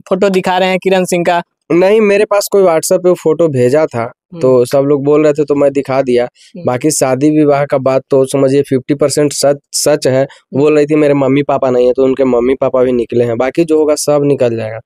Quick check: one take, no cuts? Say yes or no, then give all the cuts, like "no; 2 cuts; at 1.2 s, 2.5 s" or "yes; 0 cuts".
yes; 0 cuts